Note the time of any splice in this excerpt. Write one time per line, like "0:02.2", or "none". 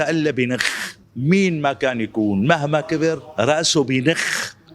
0:01.1